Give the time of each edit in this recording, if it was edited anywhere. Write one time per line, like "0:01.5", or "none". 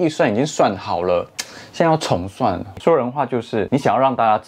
0:02.7